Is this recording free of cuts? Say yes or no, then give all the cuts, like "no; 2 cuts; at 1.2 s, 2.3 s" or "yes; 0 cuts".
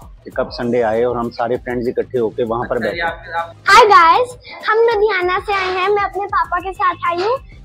yes; 0 cuts